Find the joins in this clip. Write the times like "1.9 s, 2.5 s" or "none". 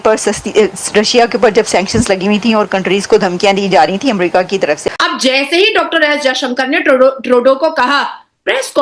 4.8 s